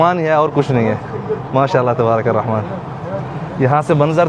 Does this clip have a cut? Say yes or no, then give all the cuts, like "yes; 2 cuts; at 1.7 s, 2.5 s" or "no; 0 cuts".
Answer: no; 0 cuts